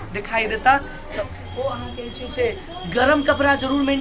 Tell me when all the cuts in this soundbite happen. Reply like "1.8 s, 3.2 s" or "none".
1.2 s